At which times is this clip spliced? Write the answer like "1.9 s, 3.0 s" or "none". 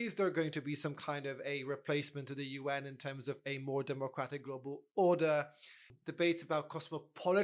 5.9 s

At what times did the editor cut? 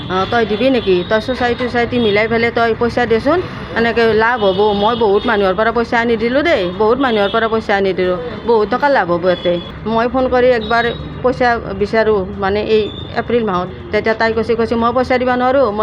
9.7 s, 13.7 s

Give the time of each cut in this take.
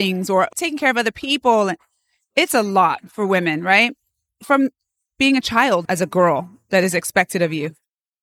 5.8 s

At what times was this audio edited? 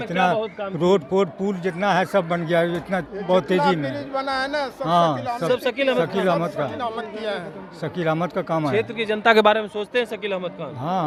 none

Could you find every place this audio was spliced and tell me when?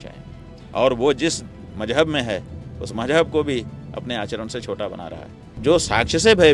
5.6 s

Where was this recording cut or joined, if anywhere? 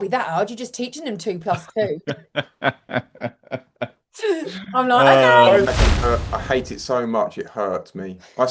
5.7 s

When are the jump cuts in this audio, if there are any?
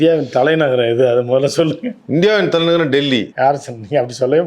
3.3 s

